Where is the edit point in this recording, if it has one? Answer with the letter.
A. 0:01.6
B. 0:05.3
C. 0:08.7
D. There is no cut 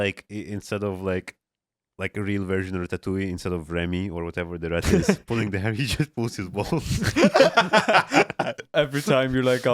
C